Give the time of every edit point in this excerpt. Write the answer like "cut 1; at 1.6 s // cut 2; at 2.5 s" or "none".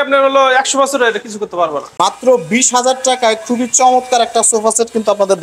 cut 1; at 1.8 s